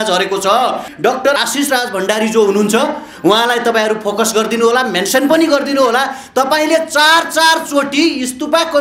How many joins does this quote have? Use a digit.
1